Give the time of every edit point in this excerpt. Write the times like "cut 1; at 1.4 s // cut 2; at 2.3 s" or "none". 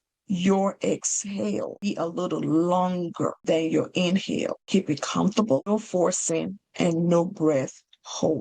cut 1; at 1.9 s // cut 2; at 3.4 s // cut 3; at 4.6 s // cut 4; at 5.7 s